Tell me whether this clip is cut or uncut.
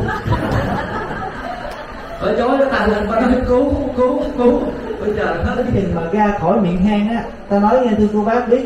cut